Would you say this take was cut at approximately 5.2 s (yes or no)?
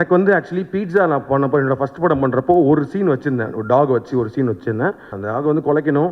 yes